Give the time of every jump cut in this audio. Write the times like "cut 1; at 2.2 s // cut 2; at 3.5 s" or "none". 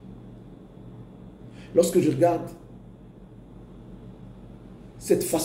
none